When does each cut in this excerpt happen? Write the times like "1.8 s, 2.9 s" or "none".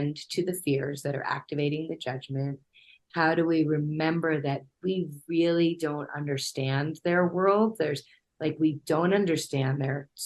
none